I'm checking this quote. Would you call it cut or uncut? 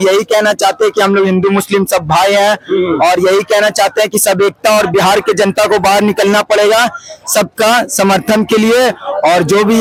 uncut